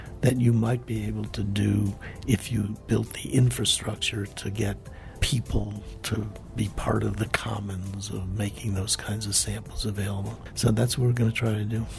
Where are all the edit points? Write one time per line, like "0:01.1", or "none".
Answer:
0:10.4